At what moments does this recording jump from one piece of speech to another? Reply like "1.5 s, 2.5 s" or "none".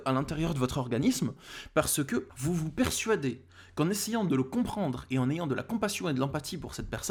none